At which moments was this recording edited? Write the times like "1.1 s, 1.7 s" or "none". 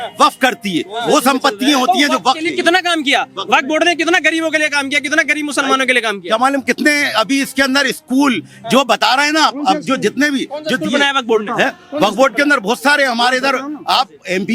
none